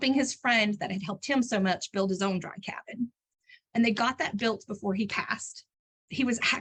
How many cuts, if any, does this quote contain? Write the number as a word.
zero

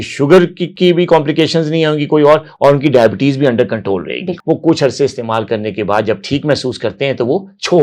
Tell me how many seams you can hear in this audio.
one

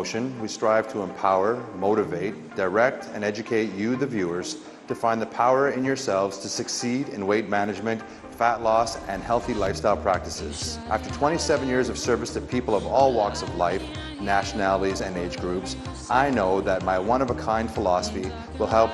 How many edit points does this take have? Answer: one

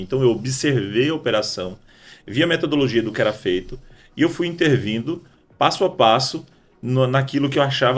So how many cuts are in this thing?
zero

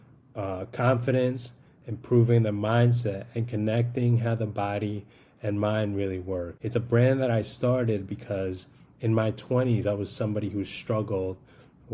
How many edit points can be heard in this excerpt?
one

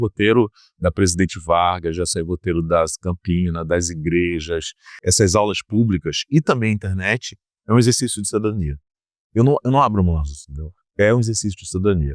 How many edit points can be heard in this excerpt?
one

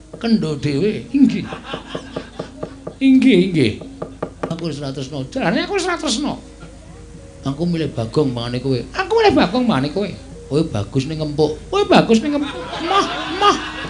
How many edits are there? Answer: one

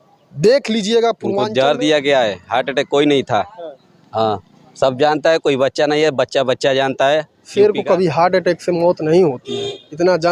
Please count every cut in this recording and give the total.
two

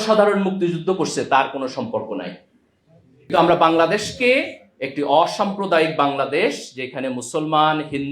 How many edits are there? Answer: one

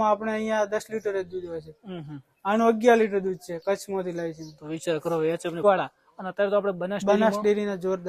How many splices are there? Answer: one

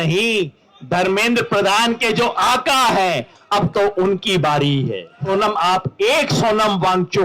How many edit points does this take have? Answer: one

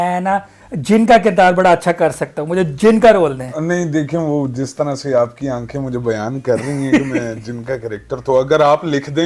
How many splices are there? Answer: zero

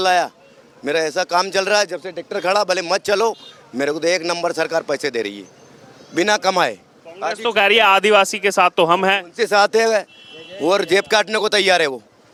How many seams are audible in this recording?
zero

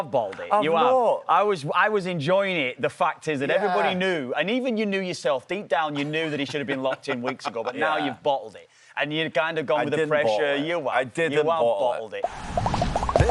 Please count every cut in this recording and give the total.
one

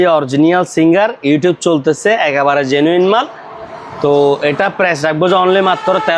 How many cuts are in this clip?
zero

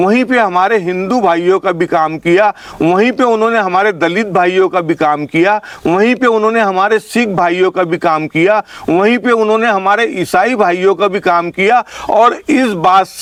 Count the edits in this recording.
zero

